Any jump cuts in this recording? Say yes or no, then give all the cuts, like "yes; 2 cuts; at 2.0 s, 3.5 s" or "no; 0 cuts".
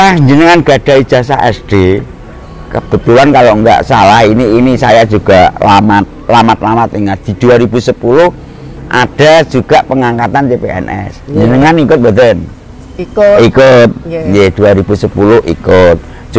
no; 0 cuts